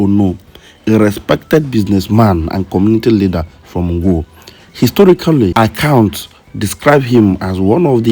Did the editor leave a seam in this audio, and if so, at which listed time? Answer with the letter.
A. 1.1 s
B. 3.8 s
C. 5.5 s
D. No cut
C